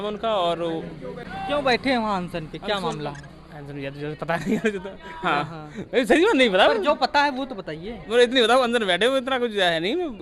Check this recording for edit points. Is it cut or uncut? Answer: cut